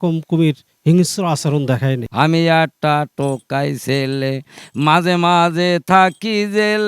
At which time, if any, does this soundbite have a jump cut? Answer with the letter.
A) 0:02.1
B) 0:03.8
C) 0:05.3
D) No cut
A